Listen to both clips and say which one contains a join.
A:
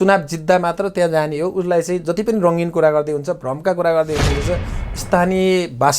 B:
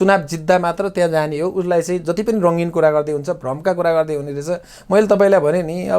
A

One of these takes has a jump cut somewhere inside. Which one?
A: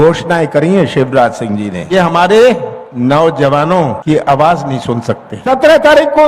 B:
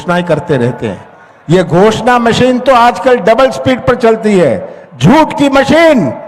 A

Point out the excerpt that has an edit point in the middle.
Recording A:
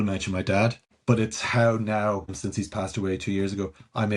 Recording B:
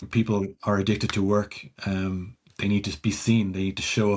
A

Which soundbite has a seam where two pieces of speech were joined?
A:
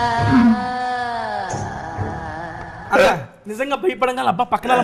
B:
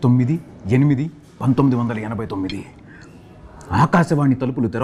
A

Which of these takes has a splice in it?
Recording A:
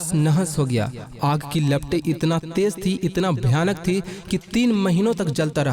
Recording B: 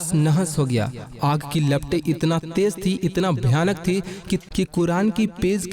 B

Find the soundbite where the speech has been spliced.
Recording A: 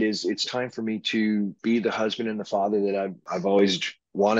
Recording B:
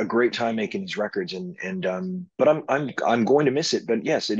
A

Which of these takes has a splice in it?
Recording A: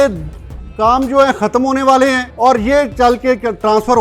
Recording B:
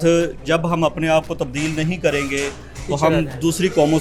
A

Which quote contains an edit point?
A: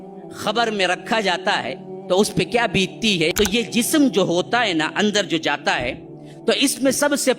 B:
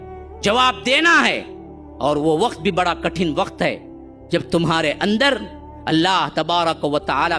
A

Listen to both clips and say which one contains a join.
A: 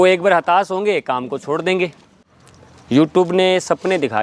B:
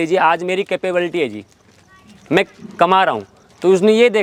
A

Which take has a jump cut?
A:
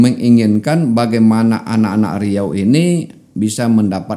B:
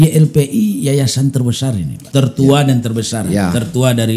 B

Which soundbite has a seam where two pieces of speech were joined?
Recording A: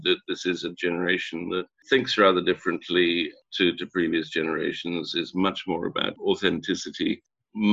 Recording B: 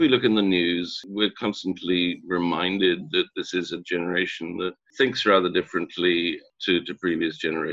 B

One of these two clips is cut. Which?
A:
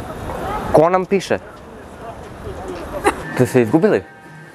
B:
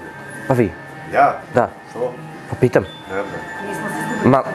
A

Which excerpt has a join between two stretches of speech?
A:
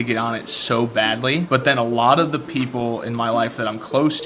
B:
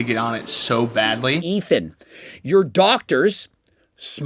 B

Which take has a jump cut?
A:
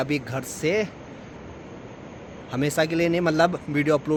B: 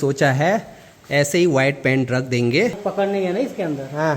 B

